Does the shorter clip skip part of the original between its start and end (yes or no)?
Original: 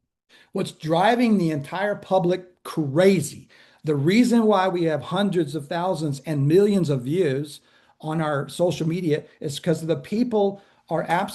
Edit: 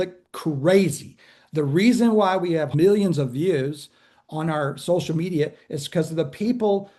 yes